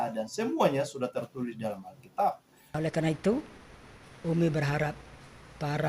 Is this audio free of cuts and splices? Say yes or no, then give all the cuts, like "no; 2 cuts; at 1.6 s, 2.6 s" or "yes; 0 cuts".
no; 1 cut; at 2.8 s